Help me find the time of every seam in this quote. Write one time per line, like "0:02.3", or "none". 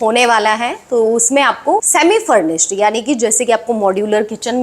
0:01.9